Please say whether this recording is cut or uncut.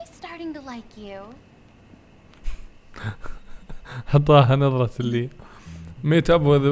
uncut